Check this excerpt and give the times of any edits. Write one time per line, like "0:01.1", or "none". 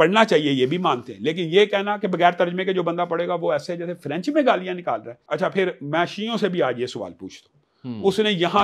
0:05.1